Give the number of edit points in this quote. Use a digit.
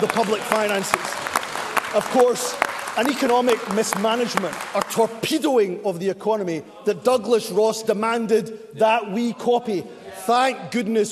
0